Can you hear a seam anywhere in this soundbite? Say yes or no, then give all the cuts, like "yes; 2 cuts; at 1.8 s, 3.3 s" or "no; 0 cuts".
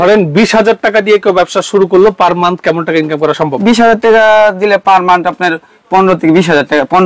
no; 0 cuts